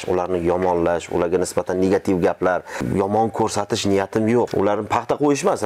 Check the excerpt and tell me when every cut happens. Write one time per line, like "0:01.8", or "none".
0:02.8
0:04.5